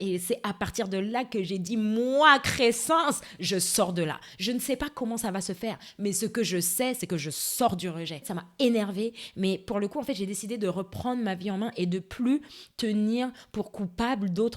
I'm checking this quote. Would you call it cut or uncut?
uncut